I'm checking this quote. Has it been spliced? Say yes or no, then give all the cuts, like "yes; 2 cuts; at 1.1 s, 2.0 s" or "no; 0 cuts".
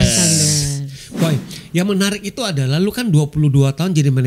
yes; 1 cut; at 1.0 s